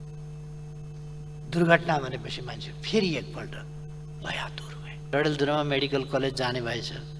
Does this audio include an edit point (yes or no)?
yes